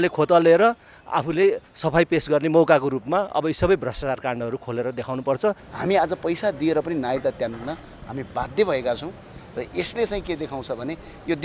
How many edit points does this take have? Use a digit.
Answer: 1